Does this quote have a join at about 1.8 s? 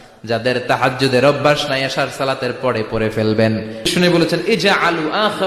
no; 1 cut; at 3.9 s

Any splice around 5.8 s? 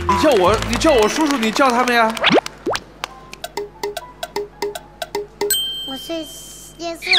yes; 1 cut; at 5.8 s

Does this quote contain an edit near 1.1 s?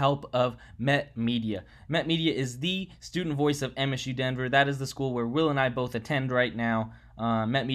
no; 0 cuts

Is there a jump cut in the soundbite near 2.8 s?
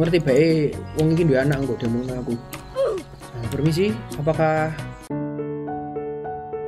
yes; 1 cut; at 2.8 s

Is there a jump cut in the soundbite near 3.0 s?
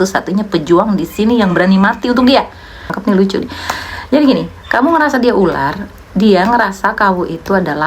yes; 1 cut; at 3.0 s

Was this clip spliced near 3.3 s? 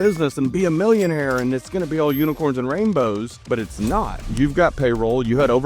yes; 2 cuts; at 3.3 s, 4.2 s

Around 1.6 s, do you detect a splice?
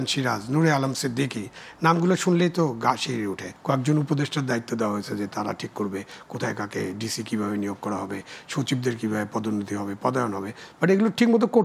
no; 1 cut; at 3.5 s

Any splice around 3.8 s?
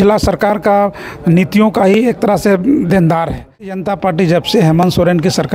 yes; 1 cut; at 3.8 s

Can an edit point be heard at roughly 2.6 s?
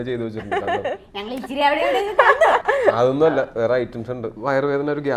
yes; 2 cuts; at 2.6 s, 4.3 s

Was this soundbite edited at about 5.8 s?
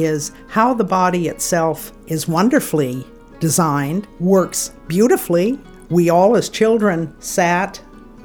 no; 3 cuts; at 1.9 s, 4.1 s, 7.2 s

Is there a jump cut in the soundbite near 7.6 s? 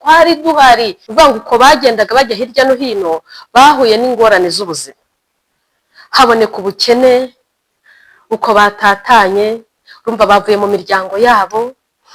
no; 1 cut; at 1.0 s

